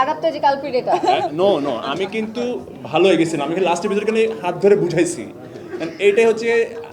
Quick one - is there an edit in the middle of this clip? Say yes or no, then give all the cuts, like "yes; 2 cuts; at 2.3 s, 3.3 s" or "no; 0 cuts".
no; 0 cuts